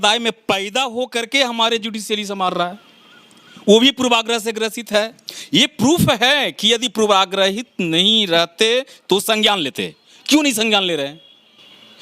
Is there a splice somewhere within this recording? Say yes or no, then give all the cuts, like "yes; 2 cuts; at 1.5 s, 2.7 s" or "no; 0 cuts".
no; 0 cuts